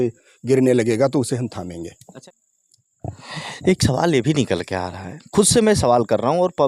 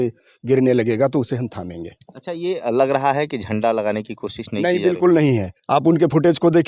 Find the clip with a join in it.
first; 1 cut; at 2.1 s

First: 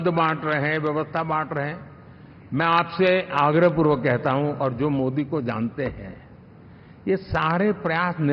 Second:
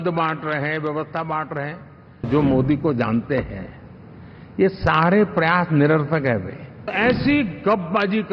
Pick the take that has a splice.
second; 2 cuts; at 2.3 s, 6.9 s

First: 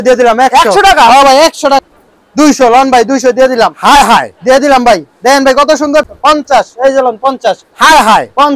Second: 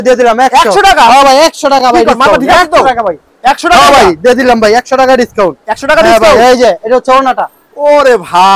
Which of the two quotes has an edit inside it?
first; 2 cuts; at 1.8 s, 6.1 s

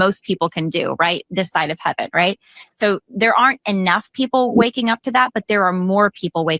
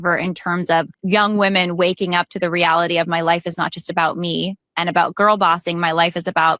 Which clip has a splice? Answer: second; 2 cuts; at 1.0 s, 4.6 s

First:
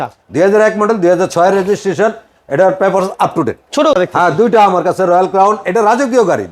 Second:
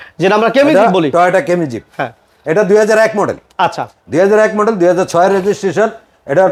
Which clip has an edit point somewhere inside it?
first; 1 cut; at 3.9 s

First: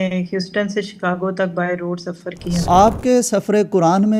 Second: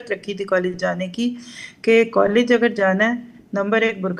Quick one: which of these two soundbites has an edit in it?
first; 1 cut; at 2.7 s

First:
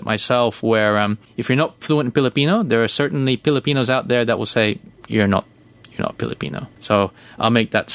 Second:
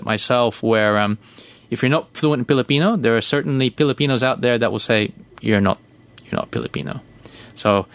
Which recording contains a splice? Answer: first; 2 cuts; at 1.3 s, 6.7 s

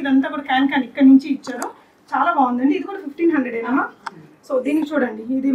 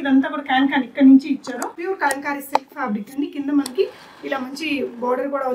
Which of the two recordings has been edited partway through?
second; 1 cut; at 1.8 s

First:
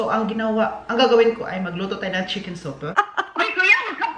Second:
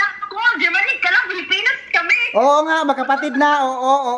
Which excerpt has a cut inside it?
first; 1 cut; at 2.9 s

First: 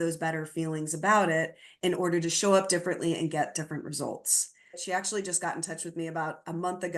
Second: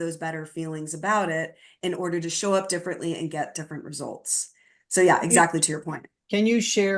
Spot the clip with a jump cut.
first; 1 cut; at 4.8 s

